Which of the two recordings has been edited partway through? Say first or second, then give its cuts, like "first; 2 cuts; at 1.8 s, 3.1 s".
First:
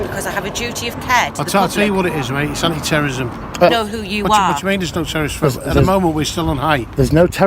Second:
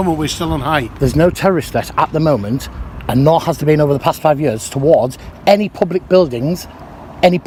first; 1 cut; at 3.7 s